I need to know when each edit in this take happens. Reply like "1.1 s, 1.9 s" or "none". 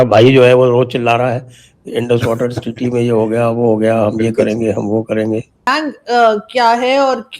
5.5 s